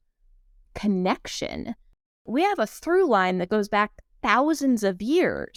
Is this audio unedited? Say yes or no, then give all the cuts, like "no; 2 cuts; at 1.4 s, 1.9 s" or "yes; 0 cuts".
yes; 0 cuts